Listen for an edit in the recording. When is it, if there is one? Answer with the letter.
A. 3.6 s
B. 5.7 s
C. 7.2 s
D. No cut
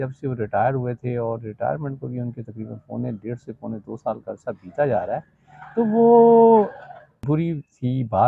C